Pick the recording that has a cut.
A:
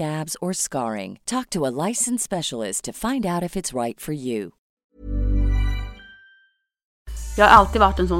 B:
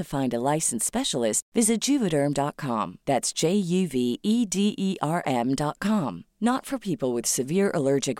A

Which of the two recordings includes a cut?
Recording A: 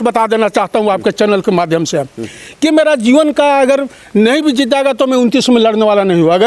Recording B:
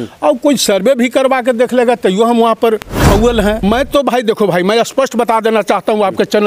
B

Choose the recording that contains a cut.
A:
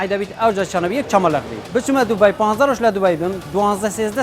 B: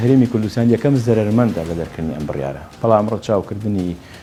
A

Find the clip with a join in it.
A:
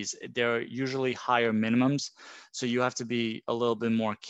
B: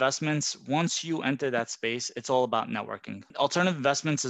B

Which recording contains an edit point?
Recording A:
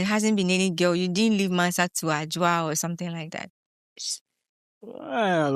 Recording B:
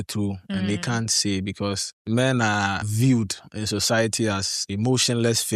B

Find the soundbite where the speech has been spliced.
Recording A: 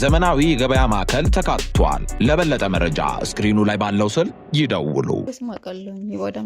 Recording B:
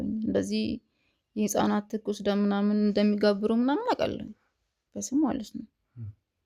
A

